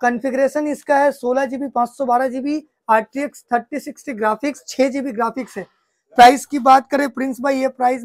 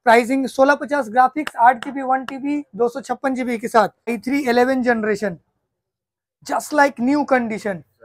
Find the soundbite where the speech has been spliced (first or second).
second